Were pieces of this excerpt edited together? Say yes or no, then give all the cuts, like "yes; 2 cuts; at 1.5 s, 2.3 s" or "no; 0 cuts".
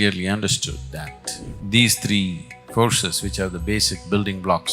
yes; 1 cut; at 1.5 s